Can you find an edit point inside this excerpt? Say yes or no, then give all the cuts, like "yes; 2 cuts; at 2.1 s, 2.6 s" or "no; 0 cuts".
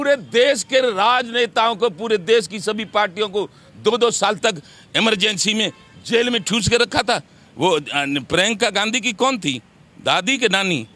no; 0 cuts